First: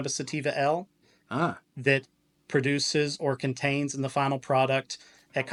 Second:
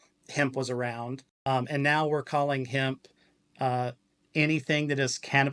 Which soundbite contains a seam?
second; 1 cut; at 1.7 s

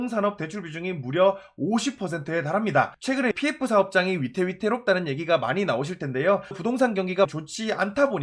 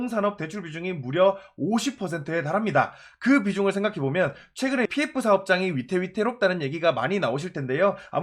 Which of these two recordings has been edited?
first; 3 cuts; at 3.3 s, 6.6 s, 7.3 s

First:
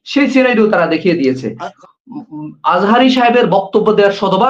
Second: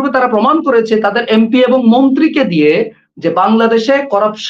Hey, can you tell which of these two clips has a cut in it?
first; 1 cut; at 1.7 s

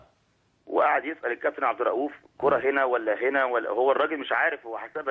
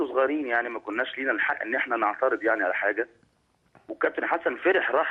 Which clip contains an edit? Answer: first; 1 cut; at 3.7 s

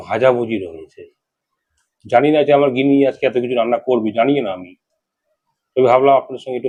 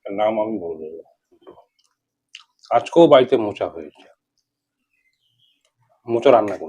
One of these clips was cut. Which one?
second; 1 cut; at 1.4 s

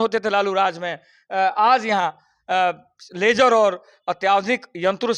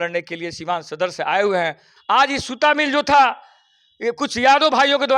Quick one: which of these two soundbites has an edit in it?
second; 1 cut; at 1.9 s

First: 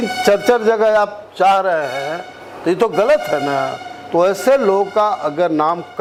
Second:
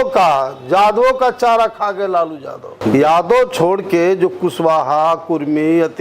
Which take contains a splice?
second; 1 cut; at 2.7 s

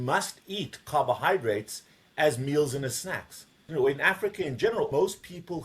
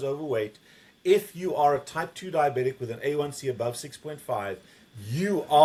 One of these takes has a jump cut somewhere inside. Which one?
first; 2 cuts; at 3.7 s, 4.9 s

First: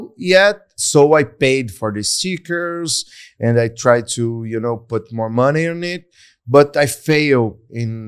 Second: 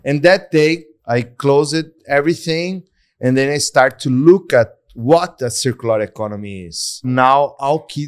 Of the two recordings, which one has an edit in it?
second; 2 cuts; at 0.9 s, 7.1 s

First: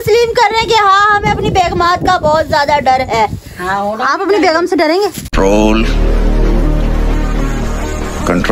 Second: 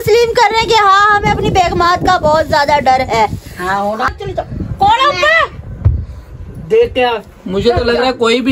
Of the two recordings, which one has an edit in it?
second; 1 cut; at 4.1 s

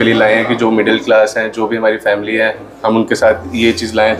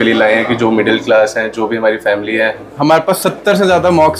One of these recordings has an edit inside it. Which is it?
second; 1 cut; at 2.7 s

